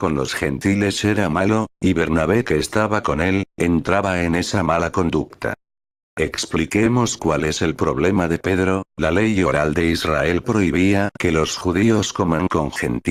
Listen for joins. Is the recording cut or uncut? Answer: uncut